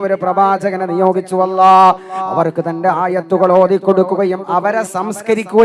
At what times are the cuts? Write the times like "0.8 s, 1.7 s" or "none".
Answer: none